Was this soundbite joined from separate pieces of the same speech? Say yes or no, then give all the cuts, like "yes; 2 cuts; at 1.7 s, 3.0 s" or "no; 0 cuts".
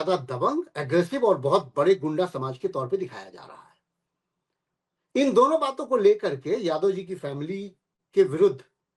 no; 0 cuts